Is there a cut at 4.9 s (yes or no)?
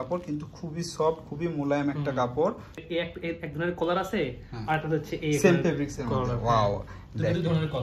no